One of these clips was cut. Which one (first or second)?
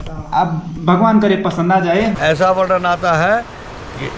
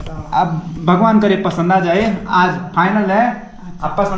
first